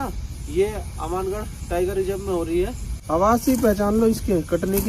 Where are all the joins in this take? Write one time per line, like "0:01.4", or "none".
0:02.9